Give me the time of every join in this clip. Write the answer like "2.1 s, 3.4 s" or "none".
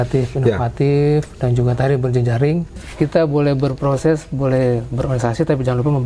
2.7 s